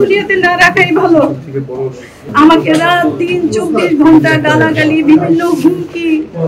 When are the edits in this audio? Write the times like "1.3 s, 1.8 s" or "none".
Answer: 2.1 s